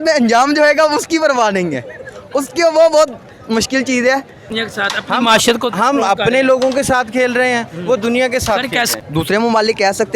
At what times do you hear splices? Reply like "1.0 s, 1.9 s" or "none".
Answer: 4.5 s, 8.9 s